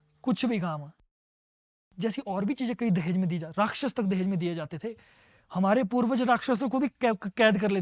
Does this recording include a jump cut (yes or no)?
no